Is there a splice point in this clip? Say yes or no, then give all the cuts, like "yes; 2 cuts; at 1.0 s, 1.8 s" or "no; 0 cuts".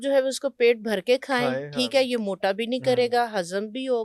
no; 0 cuts